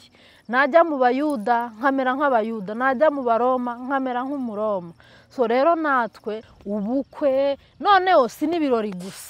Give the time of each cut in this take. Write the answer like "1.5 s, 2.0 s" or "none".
6.5 s